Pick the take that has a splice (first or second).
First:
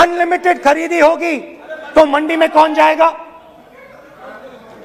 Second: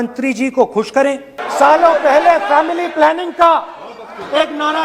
second